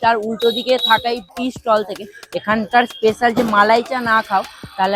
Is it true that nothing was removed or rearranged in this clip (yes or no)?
no